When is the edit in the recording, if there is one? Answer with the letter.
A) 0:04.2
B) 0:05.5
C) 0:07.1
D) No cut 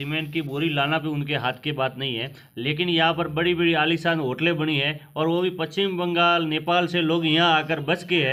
D